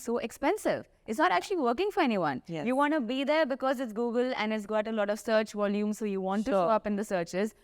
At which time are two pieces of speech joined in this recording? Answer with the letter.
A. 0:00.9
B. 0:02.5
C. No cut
C